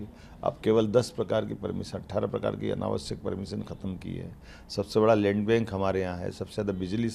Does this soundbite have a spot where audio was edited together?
no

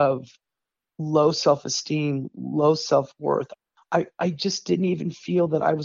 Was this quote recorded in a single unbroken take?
yes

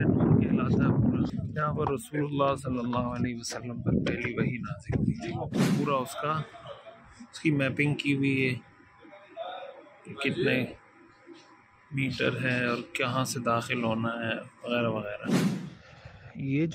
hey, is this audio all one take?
no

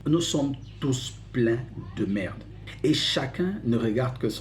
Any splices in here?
no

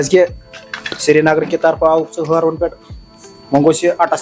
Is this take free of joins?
yes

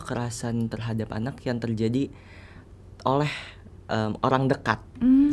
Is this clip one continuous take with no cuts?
yes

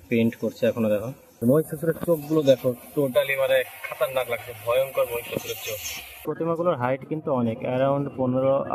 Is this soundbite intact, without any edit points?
no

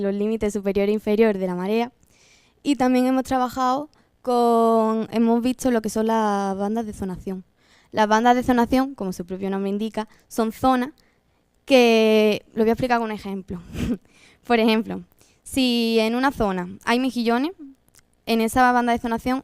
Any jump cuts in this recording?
yes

